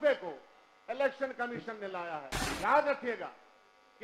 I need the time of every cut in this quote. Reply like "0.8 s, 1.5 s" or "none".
2.4 s